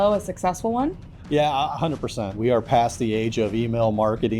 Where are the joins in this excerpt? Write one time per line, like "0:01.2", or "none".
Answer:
0:01.0
0:02.3